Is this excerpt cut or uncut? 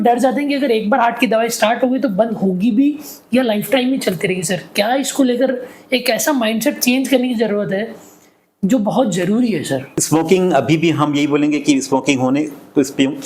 cut